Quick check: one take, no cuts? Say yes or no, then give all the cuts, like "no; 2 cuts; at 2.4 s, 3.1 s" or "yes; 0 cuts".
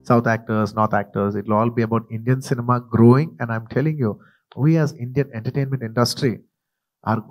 no; 1 cut; at 4.3 s